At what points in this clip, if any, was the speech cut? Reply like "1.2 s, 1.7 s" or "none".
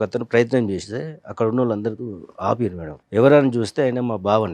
2.9 s